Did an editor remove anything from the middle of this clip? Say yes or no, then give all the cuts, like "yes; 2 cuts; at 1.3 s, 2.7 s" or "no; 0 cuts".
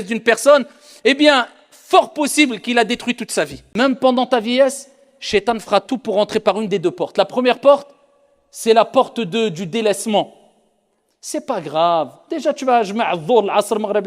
yes; 1 cut; at 3.6 s